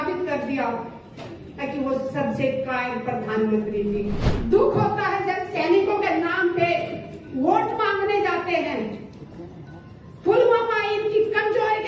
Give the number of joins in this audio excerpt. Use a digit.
1